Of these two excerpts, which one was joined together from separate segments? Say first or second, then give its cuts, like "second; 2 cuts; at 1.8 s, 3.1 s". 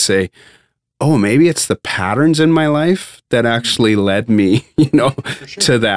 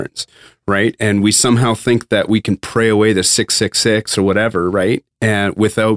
second; 1 cut; at 2.7 s